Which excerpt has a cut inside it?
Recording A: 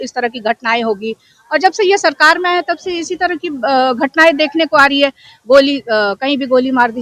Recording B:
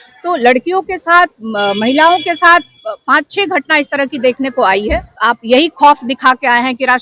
B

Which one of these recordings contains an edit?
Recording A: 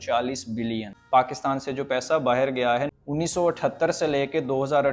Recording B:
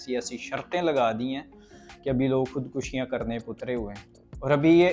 A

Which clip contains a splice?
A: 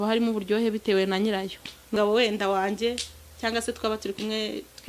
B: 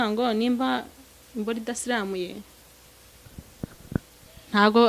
A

